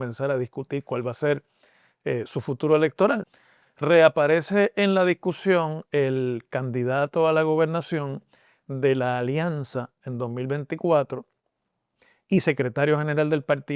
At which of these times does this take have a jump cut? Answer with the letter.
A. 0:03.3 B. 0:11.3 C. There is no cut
A